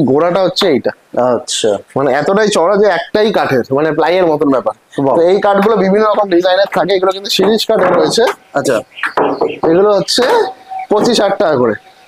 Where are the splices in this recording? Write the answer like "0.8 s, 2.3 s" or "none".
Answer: none